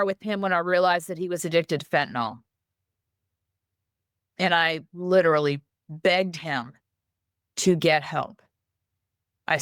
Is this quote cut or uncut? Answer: uncut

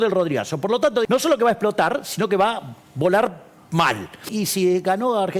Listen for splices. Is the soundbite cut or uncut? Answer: cut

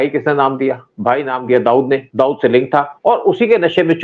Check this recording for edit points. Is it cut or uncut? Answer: uncut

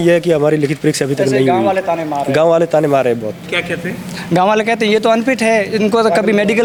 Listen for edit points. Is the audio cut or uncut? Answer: uncut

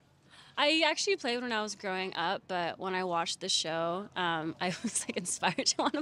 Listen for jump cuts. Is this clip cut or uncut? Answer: uncut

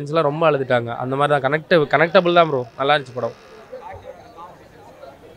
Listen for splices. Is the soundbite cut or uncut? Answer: uncut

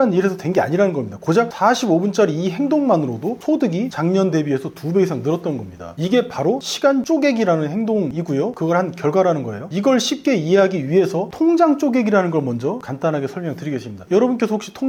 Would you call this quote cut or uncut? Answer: uncut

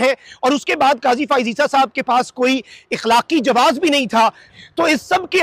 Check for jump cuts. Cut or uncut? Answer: cut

